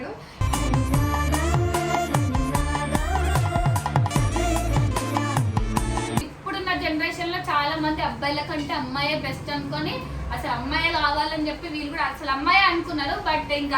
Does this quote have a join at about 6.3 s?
yes; 1 cut; at 6.3 s

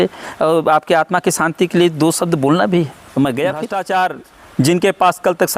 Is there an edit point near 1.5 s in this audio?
no; 1 cut; at 3.6 s

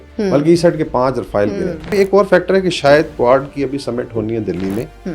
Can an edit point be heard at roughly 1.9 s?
yes; 1 cut; at 1.9 s

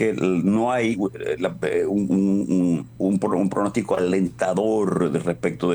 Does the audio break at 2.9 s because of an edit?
yes; 1 cut; at 2.9 s

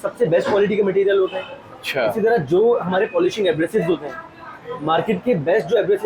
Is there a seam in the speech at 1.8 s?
no; 0 cuts

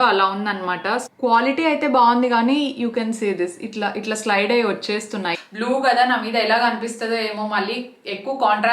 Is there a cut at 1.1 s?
yes; 2 cuts; at 1.1 s, 5.3 s

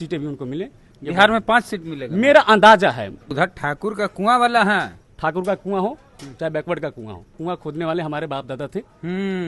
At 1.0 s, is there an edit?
no; 3 cuts; at 3.3 s, 5.0 s, 7.4 s

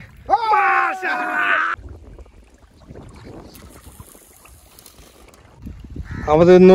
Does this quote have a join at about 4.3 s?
no; 2 cuts; at 1.8 s, 5.8 s

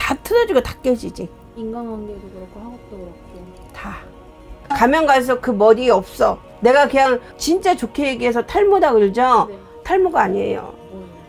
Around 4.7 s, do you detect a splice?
yes; 1 cut; at 4.7 s

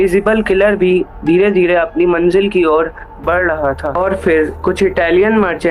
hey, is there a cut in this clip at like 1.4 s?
no; 1 cut; at 3.9 s

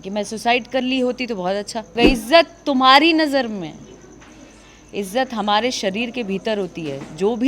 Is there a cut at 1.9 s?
yes; 1 cut; at 1.9 s

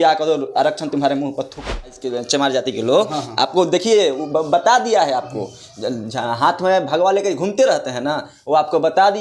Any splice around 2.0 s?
yes; 1 cut; at 2.0 s

